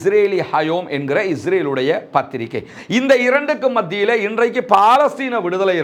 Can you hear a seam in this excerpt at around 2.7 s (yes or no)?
yes